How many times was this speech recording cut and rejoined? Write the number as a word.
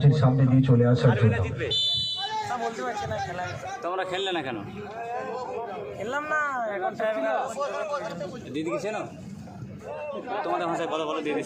zero